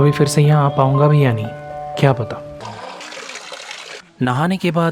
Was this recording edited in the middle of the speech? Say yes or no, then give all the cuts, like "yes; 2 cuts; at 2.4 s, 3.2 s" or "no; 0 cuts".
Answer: yes; 1 cut; at 3.0 s